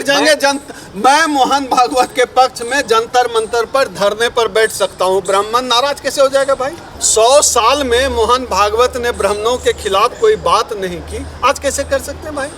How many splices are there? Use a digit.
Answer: 1